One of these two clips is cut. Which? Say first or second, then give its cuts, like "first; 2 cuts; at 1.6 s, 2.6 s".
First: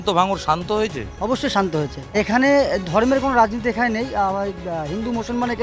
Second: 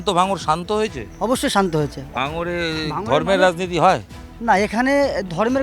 first; 1 cut; at 2.2 s